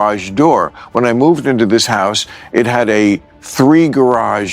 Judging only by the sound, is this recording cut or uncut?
cut